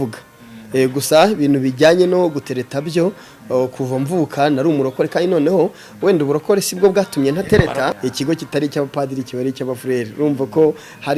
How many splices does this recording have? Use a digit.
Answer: 1